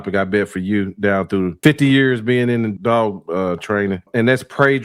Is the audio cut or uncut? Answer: cut